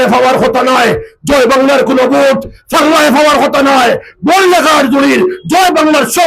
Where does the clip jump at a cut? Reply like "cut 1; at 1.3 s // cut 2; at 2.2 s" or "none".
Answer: none